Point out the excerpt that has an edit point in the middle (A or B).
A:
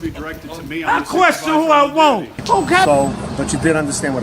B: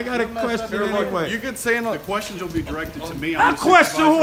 A